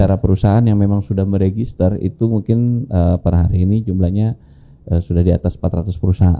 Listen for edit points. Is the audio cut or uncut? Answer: uncut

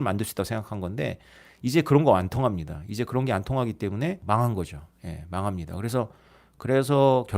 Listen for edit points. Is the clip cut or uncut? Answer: cut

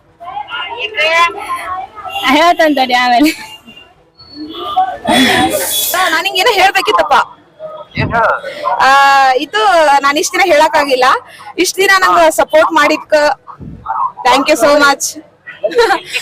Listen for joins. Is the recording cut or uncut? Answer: cut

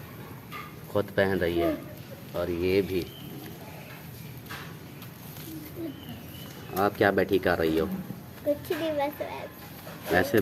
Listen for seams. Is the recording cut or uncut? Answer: uncut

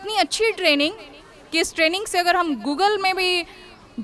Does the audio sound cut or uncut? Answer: uncut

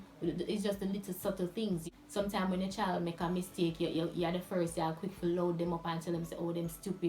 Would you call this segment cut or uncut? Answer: cut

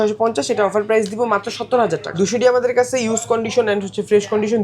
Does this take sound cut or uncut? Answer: cut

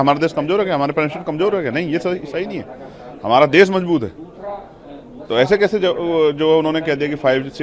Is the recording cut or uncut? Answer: uncut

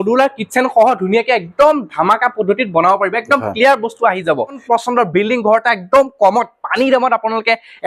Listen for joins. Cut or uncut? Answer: cut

